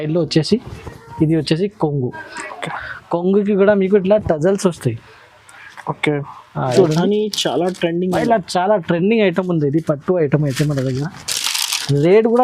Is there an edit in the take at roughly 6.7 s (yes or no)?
yes